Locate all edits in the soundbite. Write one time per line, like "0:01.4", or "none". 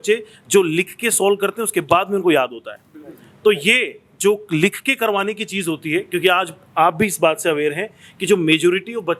none